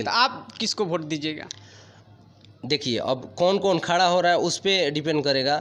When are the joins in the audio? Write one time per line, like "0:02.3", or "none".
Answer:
none